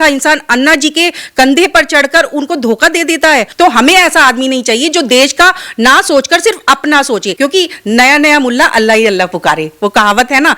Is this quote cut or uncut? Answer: cut